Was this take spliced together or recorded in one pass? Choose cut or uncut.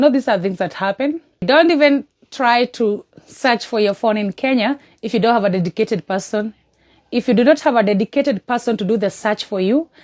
cut